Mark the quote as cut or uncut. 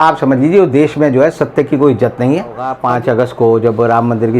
cut